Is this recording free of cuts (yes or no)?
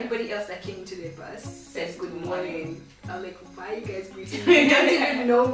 yes